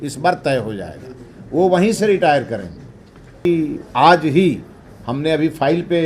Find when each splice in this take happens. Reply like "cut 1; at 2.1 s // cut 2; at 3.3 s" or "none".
cut 1; at 3.4 s